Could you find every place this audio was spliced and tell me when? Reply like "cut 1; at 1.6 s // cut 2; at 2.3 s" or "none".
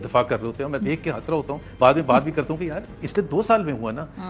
cut 1; at 3.0 s